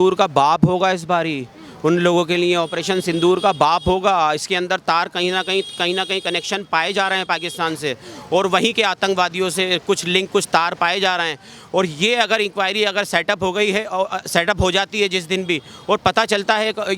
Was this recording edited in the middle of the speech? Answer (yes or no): no